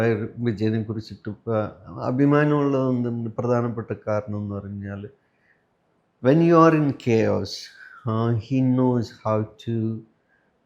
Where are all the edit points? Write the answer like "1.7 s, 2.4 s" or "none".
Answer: none